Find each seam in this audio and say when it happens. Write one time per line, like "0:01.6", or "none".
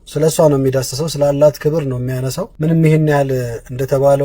0:02.5